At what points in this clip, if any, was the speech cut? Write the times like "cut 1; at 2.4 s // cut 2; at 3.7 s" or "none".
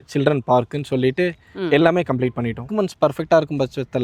cut 1; at 2.7 s